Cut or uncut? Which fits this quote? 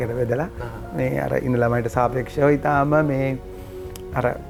uncut